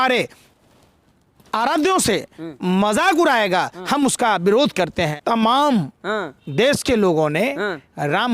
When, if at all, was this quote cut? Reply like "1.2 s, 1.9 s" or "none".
5.2 s